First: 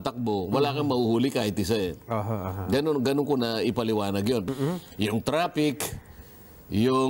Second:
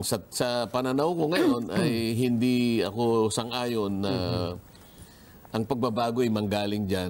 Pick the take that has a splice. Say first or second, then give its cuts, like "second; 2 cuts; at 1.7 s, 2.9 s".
first; 1 cut; at 4.5 s